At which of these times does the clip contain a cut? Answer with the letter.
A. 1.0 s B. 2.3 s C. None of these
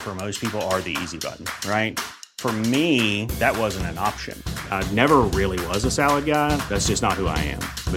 C